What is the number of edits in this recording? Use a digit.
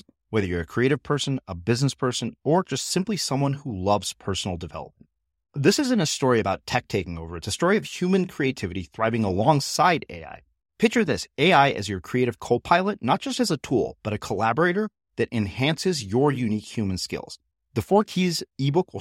0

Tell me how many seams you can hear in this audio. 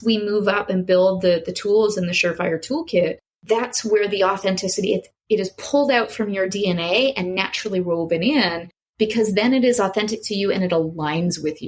0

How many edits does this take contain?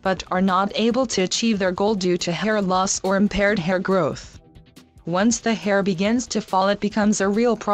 1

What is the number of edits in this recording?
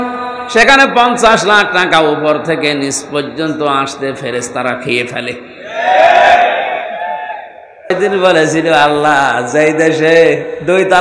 1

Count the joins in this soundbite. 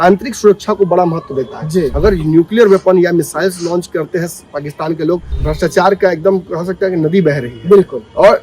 2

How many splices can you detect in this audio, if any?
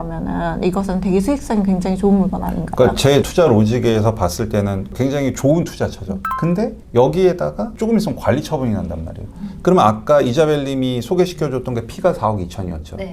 0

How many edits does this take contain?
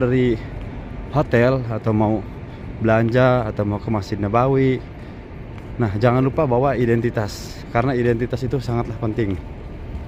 0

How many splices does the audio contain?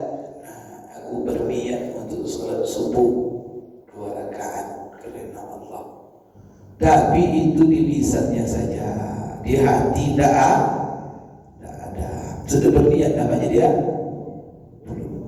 0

